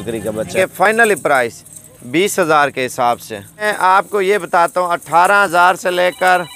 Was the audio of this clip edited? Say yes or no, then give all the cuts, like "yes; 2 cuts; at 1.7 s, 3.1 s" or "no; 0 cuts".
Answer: yes; 2 cuts; at 0.9 s, 3.7 s